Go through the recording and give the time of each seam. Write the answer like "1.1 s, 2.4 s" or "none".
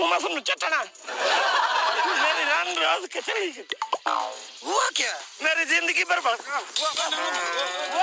4.5 s

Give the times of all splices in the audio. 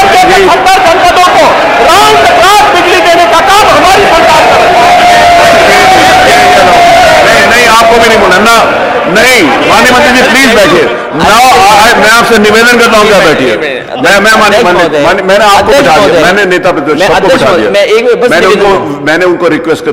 none

